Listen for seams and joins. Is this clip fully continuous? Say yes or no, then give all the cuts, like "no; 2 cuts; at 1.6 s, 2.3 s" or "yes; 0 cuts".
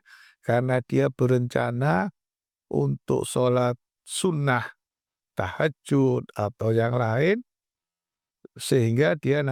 yes; 0 cuts